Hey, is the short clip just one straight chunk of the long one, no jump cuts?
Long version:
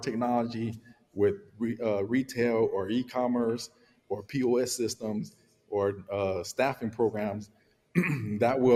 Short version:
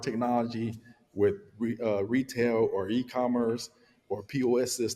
yes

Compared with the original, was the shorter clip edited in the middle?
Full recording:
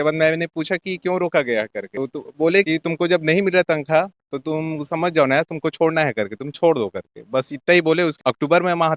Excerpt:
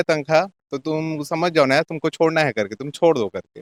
no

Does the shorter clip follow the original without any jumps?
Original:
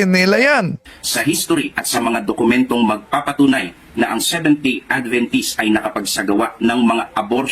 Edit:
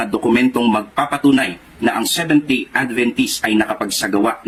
yes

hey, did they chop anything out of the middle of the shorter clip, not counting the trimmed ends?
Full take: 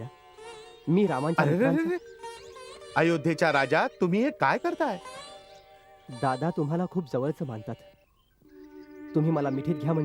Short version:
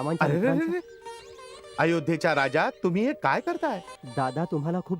yes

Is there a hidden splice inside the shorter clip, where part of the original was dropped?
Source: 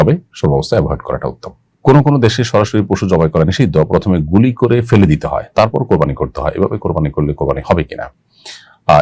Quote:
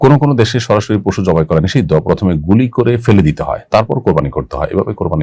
no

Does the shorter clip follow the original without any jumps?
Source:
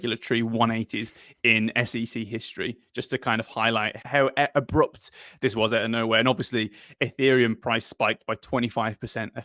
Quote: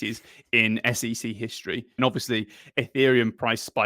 no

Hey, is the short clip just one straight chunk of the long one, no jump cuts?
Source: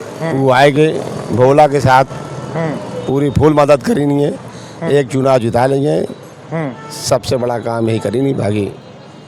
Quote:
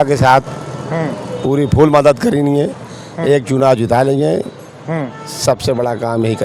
yes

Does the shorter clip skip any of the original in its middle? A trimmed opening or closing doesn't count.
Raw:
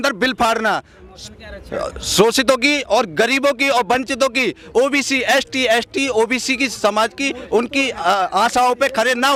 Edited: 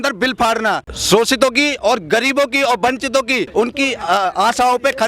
yes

